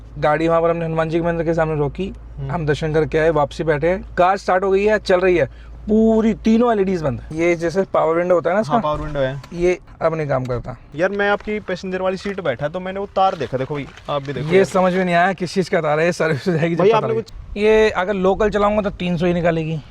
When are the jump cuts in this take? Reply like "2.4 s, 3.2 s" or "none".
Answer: 7.3 s, 9.9 s, 10.8 s, 17.3 s